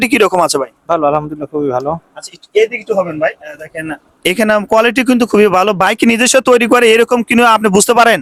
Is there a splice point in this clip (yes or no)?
no